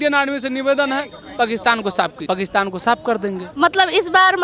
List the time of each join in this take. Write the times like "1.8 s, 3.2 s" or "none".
2.2 s